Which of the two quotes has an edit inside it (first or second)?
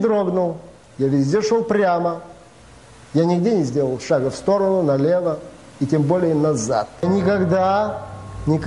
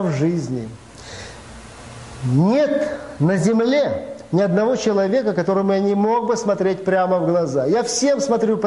first